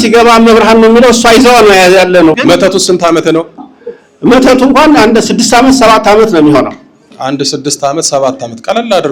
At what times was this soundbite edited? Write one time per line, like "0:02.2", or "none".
0:02.4

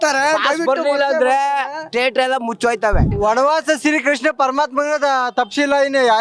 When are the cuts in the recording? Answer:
0:03.1

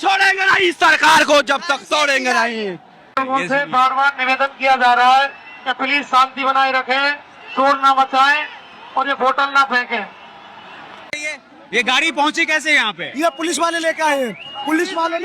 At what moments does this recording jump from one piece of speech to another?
0:03.1
0:11.1

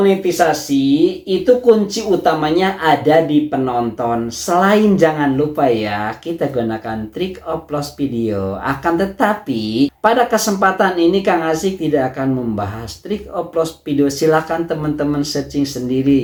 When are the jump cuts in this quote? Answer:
none

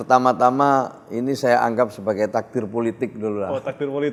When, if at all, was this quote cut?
none

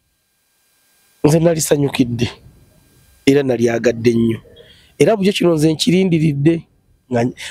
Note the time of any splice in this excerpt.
none

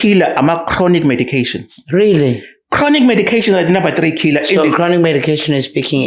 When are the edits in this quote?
none

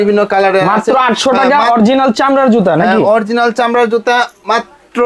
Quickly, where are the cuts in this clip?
none

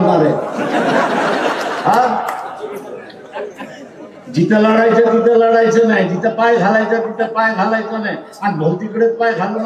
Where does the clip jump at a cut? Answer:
none

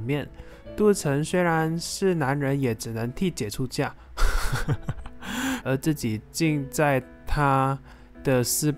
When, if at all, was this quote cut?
0:05.6

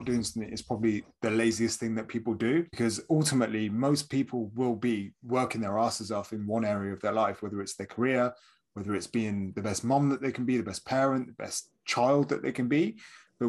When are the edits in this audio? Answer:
0:02.7

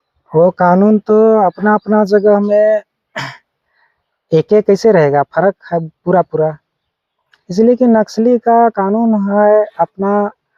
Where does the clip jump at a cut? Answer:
none

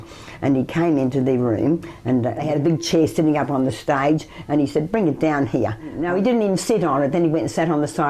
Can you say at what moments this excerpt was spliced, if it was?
0:02.4
0:06.0

